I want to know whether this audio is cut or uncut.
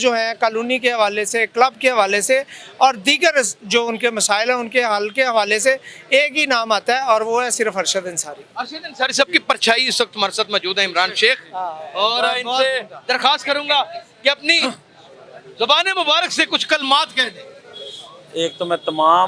uncut